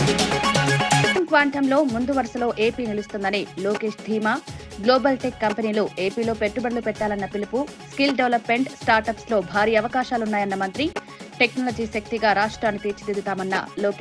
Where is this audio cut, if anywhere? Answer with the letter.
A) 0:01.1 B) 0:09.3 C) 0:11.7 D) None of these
A